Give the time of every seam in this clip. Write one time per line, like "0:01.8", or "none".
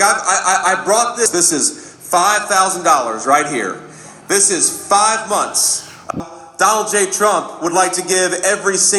0:01.3
0:06.1